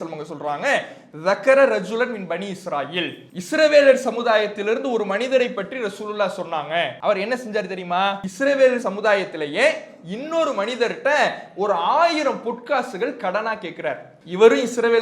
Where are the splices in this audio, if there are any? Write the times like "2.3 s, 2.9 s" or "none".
3.3 s, 6.9 s, 8.3 s, 14.1 s